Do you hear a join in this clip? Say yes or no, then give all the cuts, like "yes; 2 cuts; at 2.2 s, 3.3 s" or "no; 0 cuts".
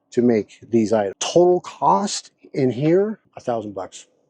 yes; 2 cuts; at 1.2 s, 3.3 s